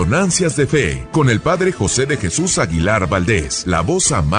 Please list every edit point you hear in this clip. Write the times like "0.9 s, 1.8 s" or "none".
1.0 s, 3.5 s